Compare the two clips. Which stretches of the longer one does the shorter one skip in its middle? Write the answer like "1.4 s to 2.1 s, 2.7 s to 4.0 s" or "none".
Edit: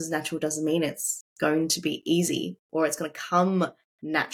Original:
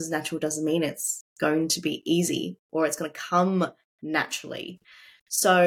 none